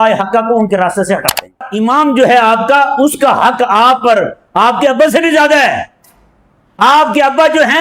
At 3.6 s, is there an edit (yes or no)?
no